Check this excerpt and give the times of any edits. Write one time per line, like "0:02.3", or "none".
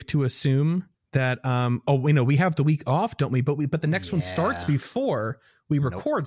0:01.0